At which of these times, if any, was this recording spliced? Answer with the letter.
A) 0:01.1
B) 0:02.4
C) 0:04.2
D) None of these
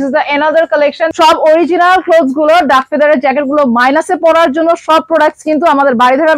A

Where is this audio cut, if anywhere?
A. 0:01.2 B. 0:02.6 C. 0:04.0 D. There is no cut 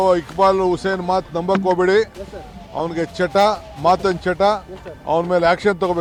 D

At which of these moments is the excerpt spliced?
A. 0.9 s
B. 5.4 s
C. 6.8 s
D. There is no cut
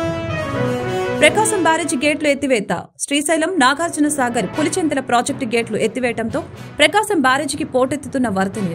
A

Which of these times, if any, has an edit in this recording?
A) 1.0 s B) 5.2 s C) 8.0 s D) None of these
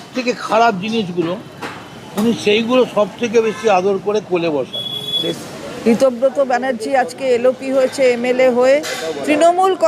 B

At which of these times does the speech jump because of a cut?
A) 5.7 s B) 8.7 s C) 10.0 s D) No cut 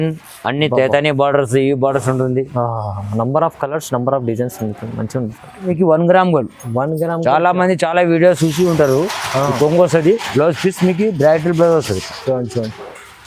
A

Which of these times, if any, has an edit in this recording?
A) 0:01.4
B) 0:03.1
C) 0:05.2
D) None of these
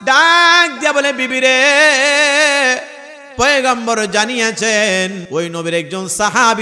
C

